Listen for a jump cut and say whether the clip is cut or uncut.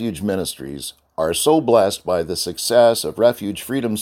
uncut